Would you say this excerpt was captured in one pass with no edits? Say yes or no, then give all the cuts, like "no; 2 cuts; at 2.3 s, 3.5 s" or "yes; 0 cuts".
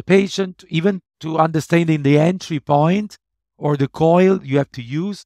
yes; 0 cuts